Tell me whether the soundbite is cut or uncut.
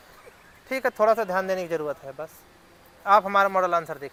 uncut